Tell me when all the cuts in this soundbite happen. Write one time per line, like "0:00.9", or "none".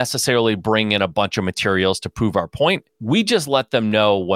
0:02.9